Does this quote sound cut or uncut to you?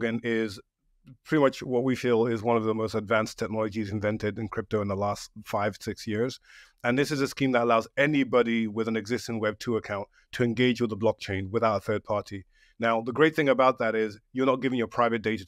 uncut